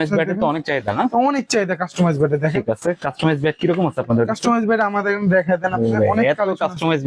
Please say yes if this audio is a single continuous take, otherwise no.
yes